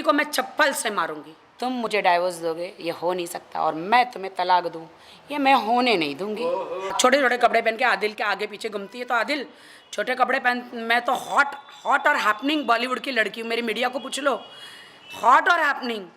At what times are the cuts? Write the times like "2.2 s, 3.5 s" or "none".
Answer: 1.9 s, 6.9 s